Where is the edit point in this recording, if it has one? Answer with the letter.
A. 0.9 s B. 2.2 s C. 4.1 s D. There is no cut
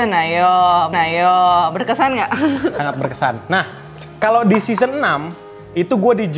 D